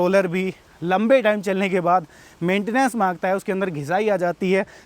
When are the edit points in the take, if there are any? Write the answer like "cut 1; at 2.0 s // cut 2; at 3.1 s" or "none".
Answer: none